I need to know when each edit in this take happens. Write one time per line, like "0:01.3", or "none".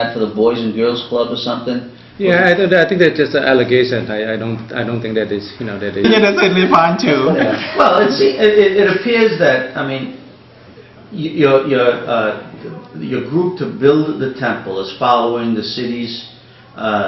none